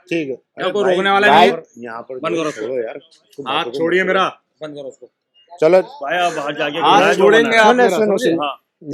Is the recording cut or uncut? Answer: uncut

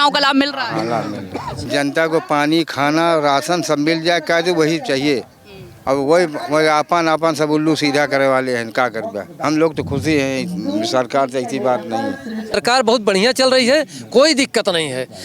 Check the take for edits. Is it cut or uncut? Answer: cut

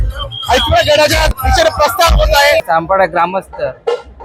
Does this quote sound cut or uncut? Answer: cut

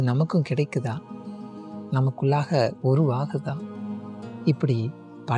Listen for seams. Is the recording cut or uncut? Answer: uncut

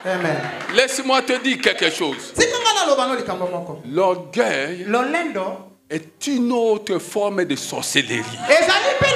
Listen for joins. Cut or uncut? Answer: uncut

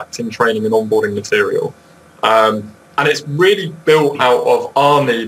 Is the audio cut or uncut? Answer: uncut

